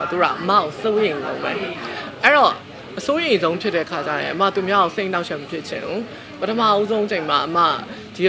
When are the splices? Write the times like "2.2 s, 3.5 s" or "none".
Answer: none